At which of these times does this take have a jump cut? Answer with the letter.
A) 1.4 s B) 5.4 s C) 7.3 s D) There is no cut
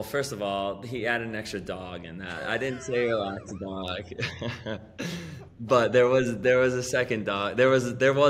D